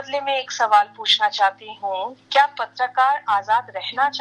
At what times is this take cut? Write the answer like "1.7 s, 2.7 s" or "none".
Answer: none